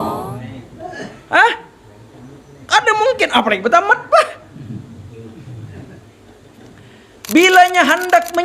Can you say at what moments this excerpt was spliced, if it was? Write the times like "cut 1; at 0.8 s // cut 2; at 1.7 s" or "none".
cut 1; at 0.9 s